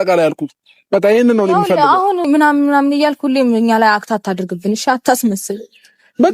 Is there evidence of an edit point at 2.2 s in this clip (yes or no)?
yes